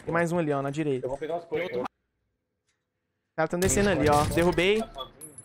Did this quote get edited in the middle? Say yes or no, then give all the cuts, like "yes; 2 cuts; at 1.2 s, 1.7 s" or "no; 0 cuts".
yes; 1 cut; at 1.9 s